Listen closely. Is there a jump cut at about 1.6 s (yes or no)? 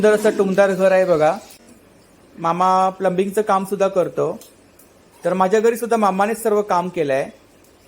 yes